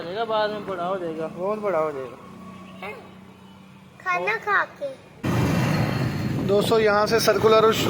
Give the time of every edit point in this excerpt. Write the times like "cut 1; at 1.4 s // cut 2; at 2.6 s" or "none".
cut 1; at 5.1 s